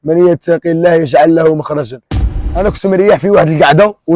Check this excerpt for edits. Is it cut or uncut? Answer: cut